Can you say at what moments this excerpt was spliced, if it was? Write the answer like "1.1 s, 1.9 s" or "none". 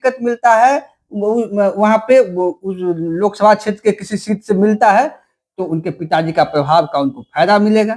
none